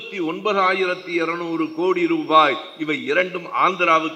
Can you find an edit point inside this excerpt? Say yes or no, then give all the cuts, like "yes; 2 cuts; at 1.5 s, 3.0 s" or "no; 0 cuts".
no; 0 cuts